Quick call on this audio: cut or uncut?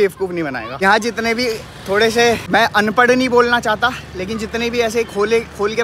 uncut